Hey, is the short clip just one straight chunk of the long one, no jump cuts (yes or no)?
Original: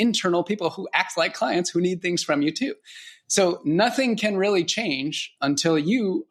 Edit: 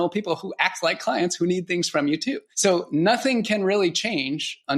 no